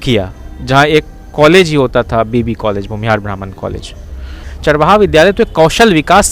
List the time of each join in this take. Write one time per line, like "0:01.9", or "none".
0:04.4